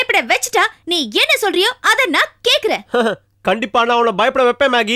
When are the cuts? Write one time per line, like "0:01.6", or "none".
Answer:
none